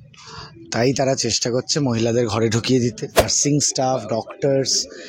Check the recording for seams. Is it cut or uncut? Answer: cut